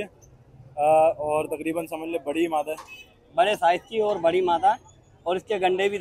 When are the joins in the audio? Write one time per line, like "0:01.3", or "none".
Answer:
none